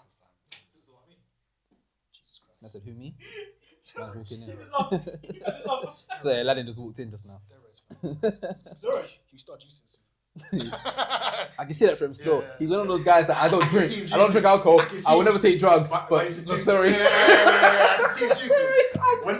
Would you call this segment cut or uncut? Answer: uncut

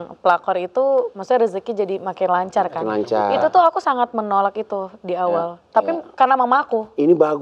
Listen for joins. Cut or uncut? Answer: uncut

